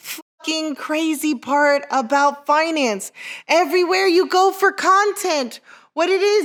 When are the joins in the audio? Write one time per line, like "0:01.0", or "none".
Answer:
none